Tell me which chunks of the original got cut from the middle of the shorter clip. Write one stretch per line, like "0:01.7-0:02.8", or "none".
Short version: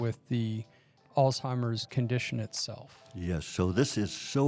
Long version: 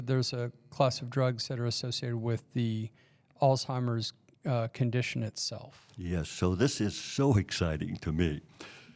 0:04.1-0:04.7